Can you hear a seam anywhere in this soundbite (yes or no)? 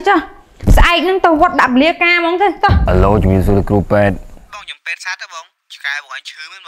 yes